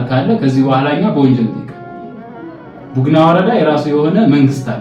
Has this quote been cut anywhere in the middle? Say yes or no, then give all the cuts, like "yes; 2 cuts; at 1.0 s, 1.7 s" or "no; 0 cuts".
no; 0 cuts